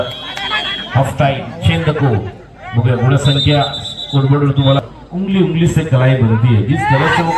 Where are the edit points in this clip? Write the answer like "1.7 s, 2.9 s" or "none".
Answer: 4.8 s